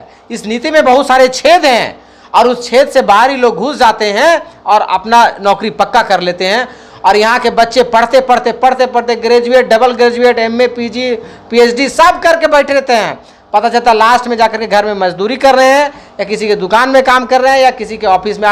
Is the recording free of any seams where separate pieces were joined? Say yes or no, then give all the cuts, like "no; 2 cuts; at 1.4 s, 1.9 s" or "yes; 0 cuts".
yes; 0 cuts